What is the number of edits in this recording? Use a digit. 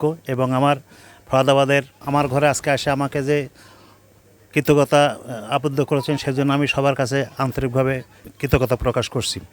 2